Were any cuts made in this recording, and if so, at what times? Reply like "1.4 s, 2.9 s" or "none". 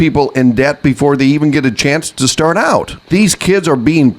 3.0 s